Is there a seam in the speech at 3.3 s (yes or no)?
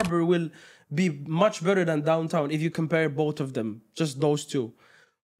no